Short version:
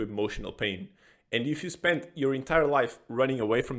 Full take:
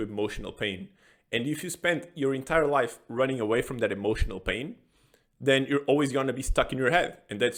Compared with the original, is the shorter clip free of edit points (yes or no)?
yes